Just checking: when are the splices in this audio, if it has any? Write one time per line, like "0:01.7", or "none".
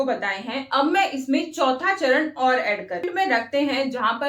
0:03.1